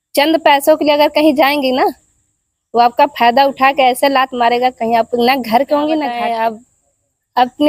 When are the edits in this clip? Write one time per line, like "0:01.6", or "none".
0:06.2

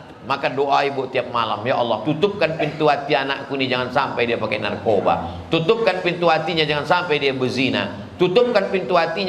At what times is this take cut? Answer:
none

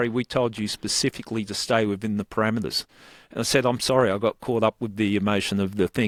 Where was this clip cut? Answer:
none

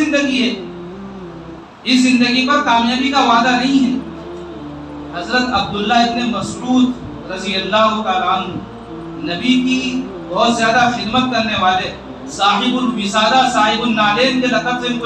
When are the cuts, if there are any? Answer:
none

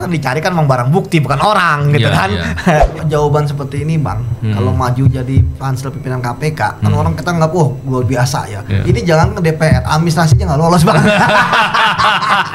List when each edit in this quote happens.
0:03.0

